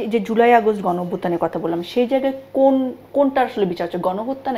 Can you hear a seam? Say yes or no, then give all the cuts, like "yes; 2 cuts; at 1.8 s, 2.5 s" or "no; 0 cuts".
no; 0 cuts